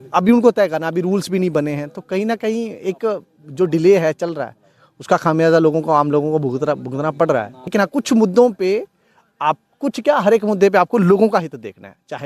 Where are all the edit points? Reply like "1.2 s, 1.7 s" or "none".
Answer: 7.7 s